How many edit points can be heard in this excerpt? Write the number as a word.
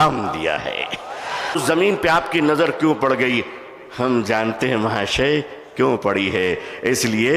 one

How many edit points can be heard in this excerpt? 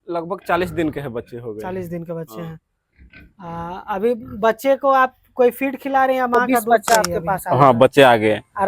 one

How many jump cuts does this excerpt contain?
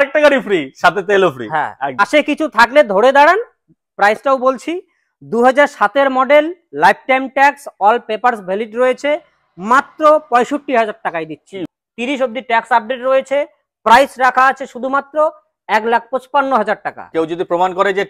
three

